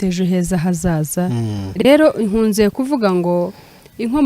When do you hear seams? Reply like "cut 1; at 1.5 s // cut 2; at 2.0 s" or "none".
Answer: cut 1; at 1.6 s

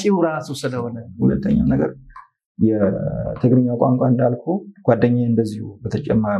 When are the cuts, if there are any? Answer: cut 1; at 1.0 s

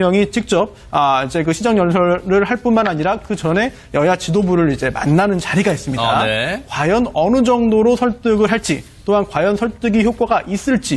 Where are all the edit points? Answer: cut 1; at 1.2 s

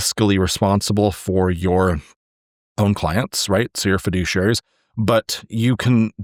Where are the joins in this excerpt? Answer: none

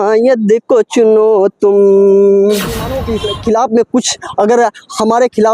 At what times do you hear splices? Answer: cut 1; at 3.0 s

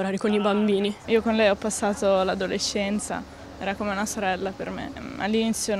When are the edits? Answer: cut 1; at 1.0 s // cut 2; at 5.0 s

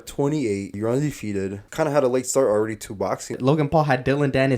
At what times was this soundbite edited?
cut 1; at 0.8 s // cut 2; at 1.6 s // cut 3; at 3.4 s

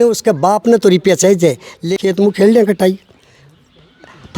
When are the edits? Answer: cut 1; at 1.8 s

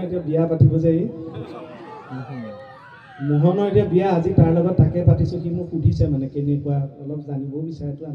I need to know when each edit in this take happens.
none

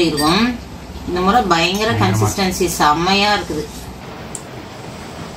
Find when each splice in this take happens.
cut 1; at 4.0 s

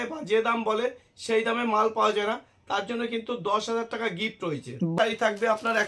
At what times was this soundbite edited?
cut 1; at 4.9 s

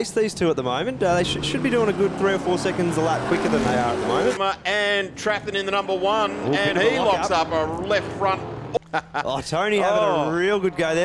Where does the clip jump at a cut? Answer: cut 1; at 4.4 s // cut 2; at 8.8 s

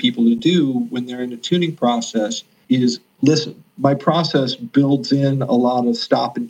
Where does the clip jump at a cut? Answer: cut 1; at 2.5 s // cut 2; at 3.6 s

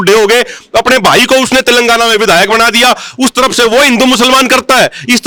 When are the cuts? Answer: none

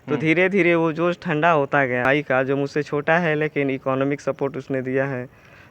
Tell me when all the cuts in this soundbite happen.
cut 1; at 2.0 s

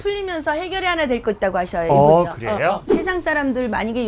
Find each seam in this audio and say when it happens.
cut 1; at 2.8 s

